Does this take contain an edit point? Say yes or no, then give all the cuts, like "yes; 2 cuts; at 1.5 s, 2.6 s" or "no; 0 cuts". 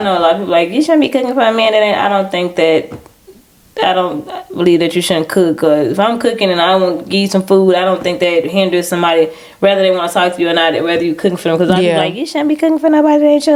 no; 0 cuts